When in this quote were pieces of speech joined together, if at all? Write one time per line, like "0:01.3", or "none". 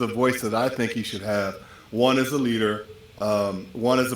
none